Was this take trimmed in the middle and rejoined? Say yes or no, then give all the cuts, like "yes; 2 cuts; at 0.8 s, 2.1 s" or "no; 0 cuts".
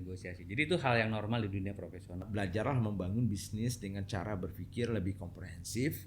yes; 1 cut; at 2.2 s